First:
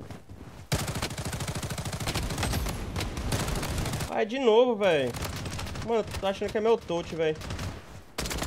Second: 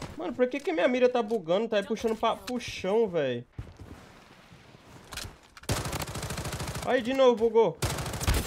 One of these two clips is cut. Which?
second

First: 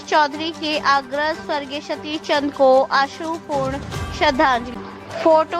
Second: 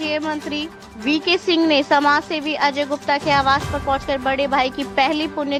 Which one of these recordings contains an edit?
first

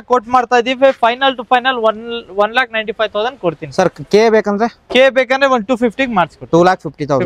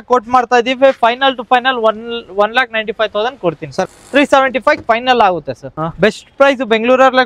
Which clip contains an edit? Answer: second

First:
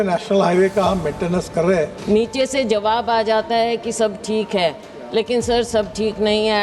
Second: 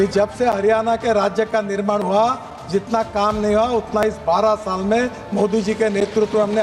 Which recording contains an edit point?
first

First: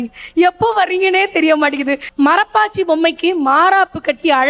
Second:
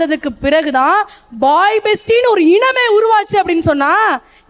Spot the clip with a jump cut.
first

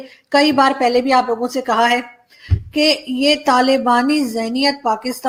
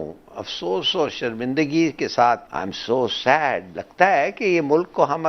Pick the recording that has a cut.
second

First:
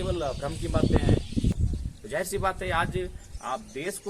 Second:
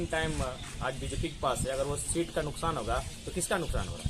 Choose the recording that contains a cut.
first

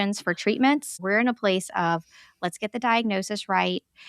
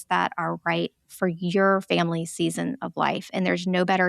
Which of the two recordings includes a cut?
first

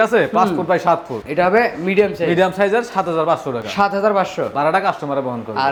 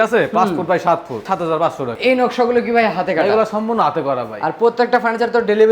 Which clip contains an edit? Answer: second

